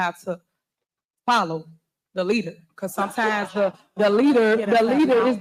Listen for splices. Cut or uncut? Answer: uncut